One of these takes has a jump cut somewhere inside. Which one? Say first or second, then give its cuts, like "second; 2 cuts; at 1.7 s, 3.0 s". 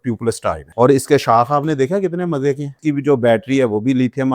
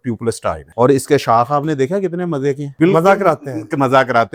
first; 1 cut; at 2.7 s